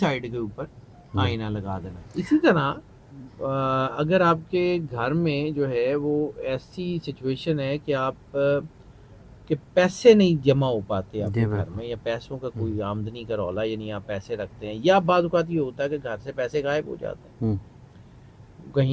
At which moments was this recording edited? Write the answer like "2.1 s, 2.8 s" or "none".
2.0 s